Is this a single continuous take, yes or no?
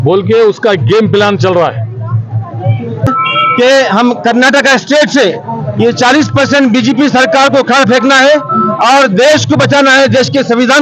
no